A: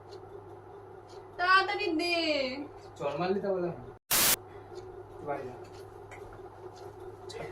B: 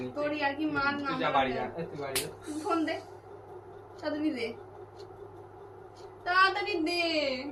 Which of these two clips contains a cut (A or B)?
A